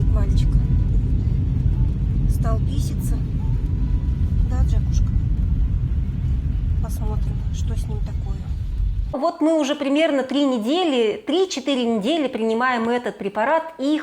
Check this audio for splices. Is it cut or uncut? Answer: cut